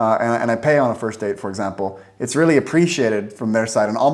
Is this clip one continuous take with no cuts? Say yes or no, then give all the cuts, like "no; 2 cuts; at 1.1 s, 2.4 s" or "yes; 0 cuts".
yes; 0 cuts